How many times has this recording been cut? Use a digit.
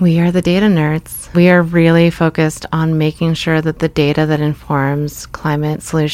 1